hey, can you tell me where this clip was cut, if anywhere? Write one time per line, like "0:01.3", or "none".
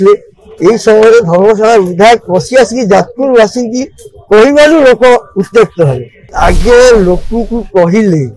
0:06.3